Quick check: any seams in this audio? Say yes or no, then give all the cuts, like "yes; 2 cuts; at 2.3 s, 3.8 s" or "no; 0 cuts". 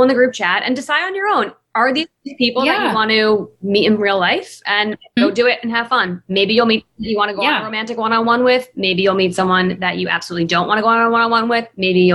no; 0 cuts